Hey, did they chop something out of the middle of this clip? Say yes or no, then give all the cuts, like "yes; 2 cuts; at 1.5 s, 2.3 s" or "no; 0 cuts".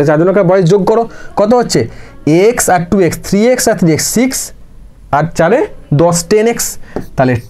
no; 0 cuts